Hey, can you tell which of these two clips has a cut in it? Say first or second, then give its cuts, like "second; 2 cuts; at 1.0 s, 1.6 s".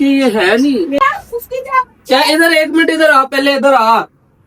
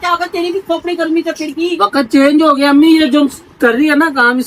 first; 1 cut; at 1.0 s